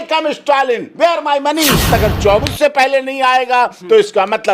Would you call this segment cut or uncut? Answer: cut